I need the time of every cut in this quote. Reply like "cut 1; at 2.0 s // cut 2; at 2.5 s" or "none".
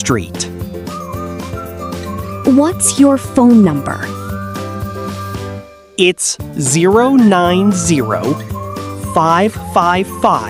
none